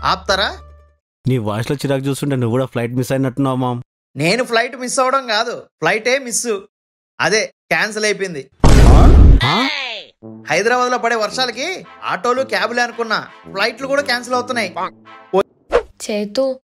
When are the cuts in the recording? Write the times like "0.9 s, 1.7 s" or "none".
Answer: 15.4 s